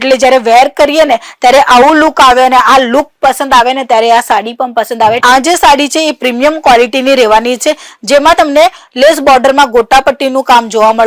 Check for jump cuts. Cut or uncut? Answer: cut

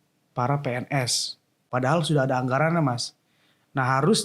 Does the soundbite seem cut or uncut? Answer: cut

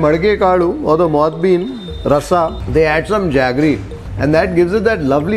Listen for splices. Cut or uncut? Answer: uncut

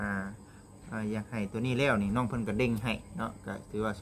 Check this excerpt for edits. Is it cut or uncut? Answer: uncut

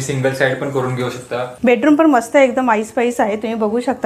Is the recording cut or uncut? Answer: cut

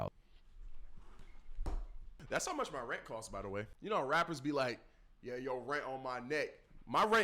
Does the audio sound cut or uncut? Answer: cut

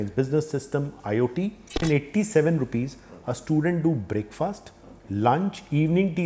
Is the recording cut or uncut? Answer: cut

